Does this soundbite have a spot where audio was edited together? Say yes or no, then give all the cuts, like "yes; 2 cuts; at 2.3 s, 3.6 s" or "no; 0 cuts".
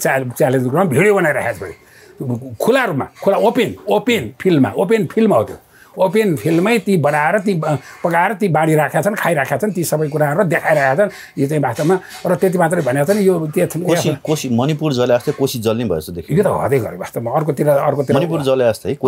no; 0 cuts